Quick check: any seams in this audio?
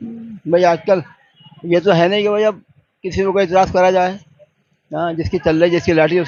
no; 0 cuts

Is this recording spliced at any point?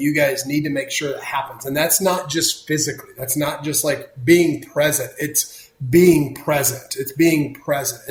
no; 0 cuts

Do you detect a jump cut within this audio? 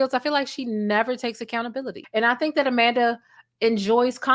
yes; 1 cut; at 2.0 s

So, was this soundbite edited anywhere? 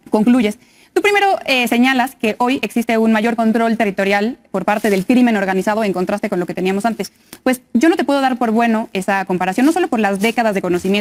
no; 0 cuts

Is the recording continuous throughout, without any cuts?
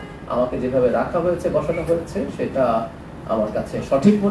yes; 0 cuts

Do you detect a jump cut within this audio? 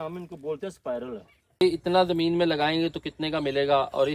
yes; 1 cut; at 1.6 s

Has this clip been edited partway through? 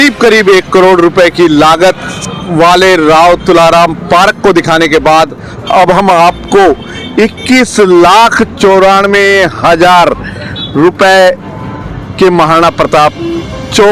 no; 0 cuts

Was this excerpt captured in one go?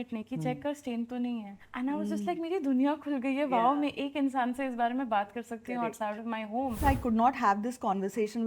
no; 2 cuts; at 1.6 s, 6.8 s

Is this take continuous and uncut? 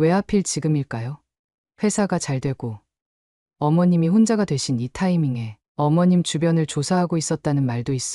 no; 1 cut; at 5.5 s

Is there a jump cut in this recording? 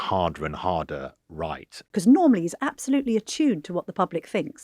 yes; 1 cut; at 1.8 s

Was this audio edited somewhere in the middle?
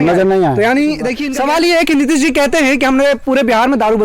yes; 1 cut; at 1.2 s

